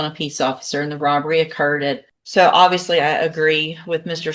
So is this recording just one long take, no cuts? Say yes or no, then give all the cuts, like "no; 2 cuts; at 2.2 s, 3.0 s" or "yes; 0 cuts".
no; 1 cut; at 2.1 s